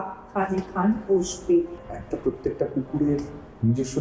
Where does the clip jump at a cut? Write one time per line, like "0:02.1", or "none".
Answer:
0:01.8